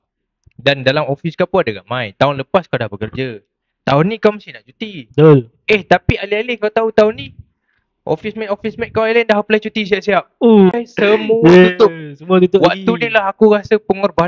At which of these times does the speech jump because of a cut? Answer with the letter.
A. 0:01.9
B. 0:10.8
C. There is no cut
B